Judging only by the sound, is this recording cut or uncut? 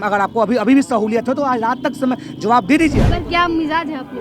cut